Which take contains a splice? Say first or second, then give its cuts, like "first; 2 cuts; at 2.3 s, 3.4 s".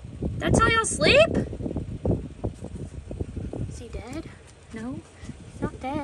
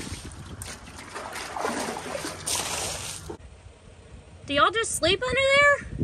second; 1 cut; at 3.4 s